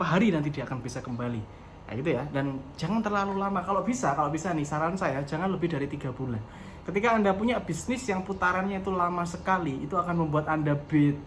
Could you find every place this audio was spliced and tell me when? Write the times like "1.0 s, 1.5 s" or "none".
none